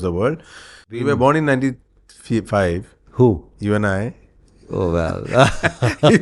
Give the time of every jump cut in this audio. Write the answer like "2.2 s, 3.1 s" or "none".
1.0 s